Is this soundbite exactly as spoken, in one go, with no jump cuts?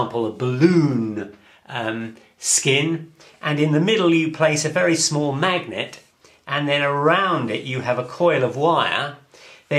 yes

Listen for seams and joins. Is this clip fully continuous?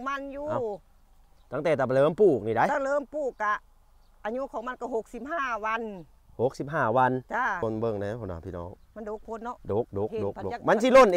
no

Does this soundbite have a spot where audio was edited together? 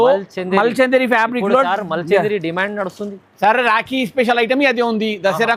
no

